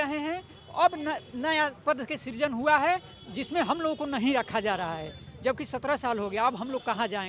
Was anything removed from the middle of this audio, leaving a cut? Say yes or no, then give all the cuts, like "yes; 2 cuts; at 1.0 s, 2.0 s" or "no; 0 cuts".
no; 0 cuts